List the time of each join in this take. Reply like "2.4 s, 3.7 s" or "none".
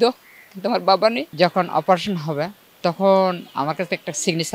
1.3 s, 2.6 s